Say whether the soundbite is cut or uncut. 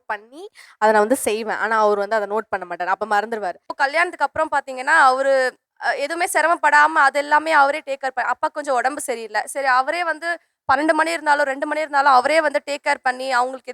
cut